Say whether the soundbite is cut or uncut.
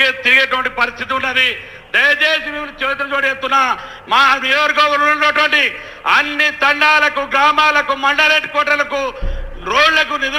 uncut